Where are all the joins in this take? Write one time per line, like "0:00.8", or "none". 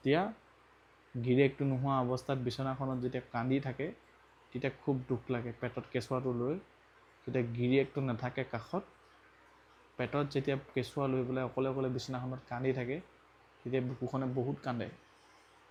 none